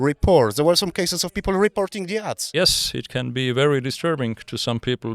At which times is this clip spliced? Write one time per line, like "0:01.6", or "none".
0:02.5